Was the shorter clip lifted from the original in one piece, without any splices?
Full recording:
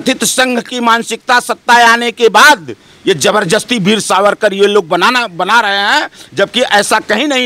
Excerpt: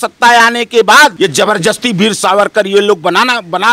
no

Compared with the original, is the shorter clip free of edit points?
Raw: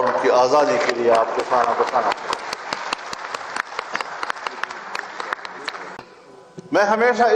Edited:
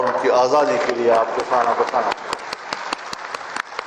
yes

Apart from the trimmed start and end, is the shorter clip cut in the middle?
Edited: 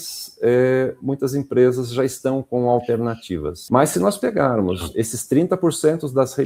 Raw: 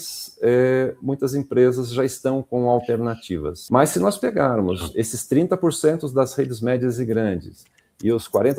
no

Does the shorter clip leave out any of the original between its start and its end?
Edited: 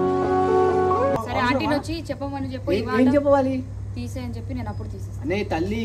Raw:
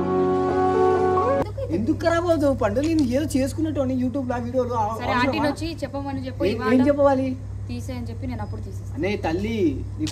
yes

